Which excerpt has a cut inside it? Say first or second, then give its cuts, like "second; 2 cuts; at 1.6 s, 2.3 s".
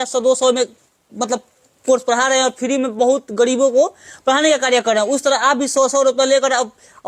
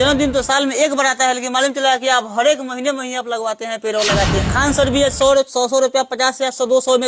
second; 1 cut; at 4.5 s